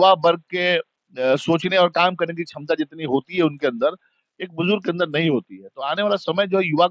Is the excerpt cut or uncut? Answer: uncut